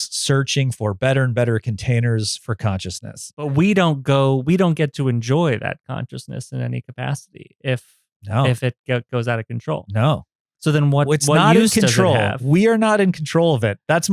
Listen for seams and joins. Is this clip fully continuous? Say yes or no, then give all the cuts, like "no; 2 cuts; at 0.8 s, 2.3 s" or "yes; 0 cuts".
no; 1 cut; at 3.5 s